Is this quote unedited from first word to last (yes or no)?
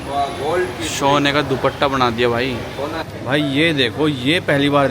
no